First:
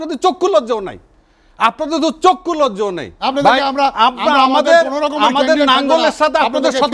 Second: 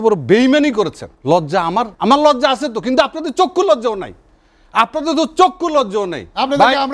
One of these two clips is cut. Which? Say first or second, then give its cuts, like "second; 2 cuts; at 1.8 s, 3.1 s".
second; 2 cuts; at 1.1 s, 1.9 s